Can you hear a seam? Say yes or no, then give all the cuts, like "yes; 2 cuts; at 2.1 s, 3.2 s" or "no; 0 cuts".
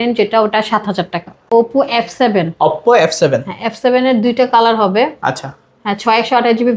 yes; 1 cut; at 1.5 s